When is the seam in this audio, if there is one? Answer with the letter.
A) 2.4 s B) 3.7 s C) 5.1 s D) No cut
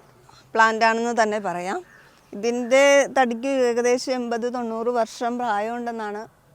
D